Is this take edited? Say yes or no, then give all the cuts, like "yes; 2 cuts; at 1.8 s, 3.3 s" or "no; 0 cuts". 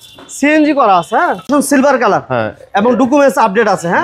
yes; 1 cut; at 1.5 s